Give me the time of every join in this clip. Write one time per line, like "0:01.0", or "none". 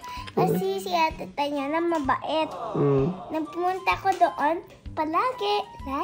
none